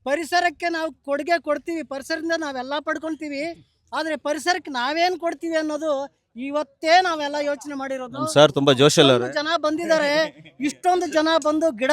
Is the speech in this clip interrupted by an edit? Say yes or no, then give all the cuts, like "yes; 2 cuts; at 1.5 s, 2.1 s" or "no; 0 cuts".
no; 0 cuts